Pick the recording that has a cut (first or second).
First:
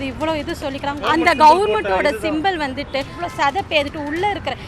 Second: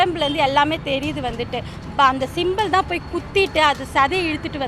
first